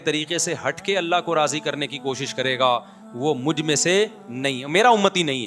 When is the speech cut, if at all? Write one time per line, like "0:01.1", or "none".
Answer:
none

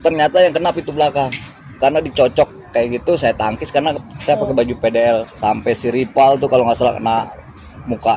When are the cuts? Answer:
0:01.8
0:05.3

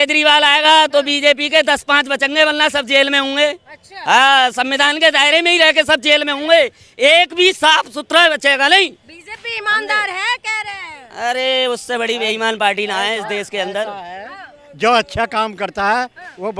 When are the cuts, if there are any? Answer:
none

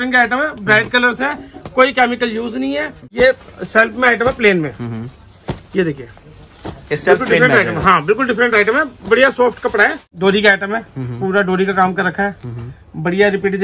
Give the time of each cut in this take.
0:03.0
0:10.1

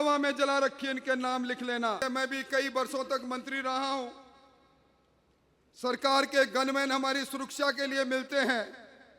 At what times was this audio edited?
0:02.0

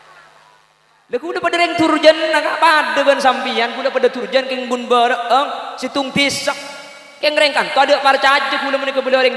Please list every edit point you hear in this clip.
0:01.1

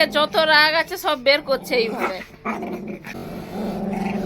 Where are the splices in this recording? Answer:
0:03.2

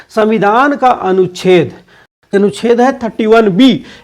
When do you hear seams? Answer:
0:02.3

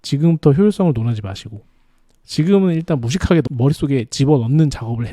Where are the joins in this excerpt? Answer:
0:03.5

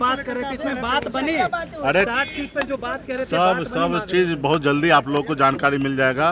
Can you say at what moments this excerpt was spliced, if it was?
none

